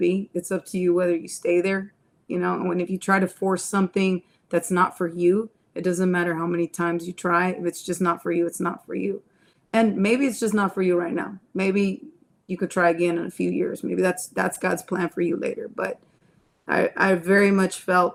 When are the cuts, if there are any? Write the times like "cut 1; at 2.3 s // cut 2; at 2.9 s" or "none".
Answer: none